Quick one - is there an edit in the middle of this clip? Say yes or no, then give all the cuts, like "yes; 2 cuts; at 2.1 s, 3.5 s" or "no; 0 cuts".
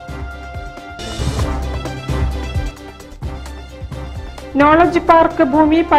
yes; 2 cuts; at 1.0 s, 4.1 s